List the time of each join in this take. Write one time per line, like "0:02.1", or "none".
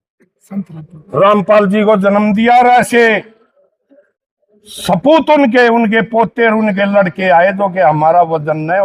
none